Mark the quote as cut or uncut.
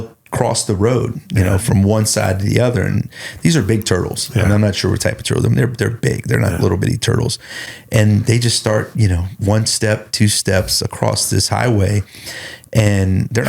uncut